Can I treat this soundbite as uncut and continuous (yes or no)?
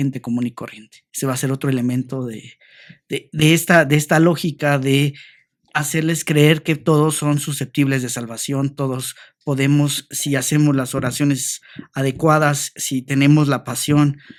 yes